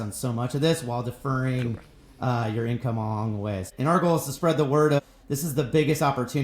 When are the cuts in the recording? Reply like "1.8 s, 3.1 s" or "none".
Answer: 3.7 s, 5.0 s